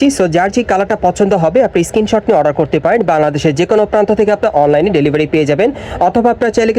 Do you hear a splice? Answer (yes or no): no